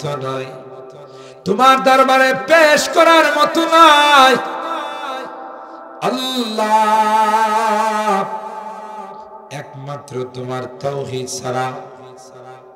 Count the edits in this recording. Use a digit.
0